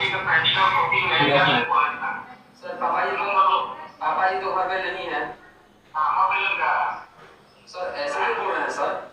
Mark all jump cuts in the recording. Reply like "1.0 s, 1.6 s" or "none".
1.6 s